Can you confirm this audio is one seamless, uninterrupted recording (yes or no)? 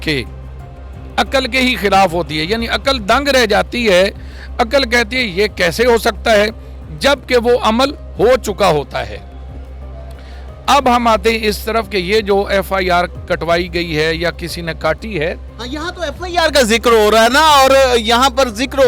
yes